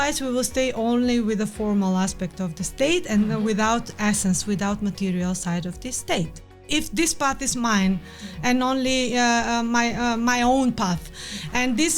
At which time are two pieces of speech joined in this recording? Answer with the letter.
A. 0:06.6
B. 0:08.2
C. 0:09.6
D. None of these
A